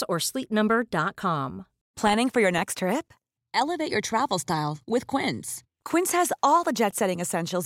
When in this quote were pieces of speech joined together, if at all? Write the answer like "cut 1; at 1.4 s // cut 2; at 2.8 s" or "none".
cut 1; at 1.8 s